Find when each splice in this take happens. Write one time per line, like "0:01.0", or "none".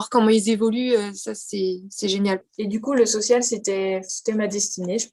0:02.5
0:04.1